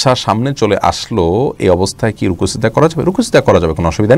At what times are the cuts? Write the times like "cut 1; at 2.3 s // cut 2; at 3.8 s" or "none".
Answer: none